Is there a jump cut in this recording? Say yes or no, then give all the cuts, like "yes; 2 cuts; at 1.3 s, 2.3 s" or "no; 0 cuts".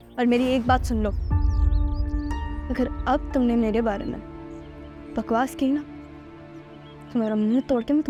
no; 0 cuts